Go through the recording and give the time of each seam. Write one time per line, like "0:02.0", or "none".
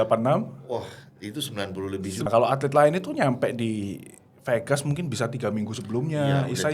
0:02.3